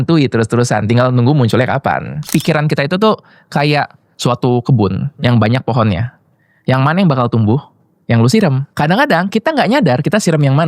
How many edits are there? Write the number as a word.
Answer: one